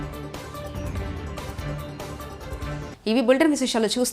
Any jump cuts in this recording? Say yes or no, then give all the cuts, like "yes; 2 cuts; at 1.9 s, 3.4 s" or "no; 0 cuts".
no; 0 cuts